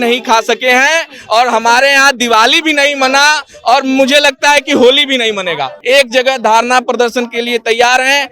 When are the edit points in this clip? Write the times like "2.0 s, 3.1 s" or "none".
5.7 s